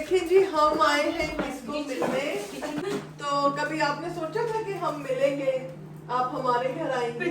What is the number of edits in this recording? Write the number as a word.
one